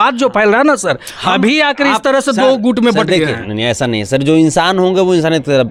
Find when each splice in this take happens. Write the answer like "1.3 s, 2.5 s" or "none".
none